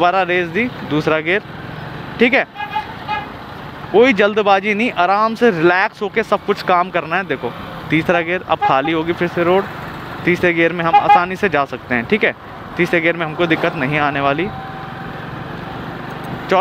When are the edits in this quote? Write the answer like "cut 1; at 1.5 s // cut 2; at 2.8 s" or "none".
none